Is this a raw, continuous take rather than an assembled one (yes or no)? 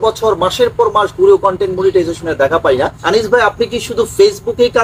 no